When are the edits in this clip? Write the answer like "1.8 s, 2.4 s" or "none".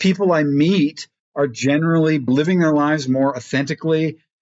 2.3 s